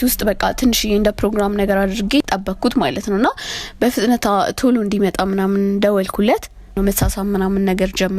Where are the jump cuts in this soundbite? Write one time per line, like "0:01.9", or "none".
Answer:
0:02.3
0:06.7